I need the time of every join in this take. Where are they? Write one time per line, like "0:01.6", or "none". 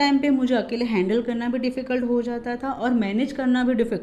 none